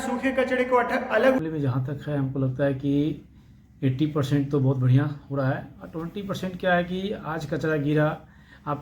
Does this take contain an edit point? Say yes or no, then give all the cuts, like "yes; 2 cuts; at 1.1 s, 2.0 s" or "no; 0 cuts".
yes; 1 cut; at 1.4 s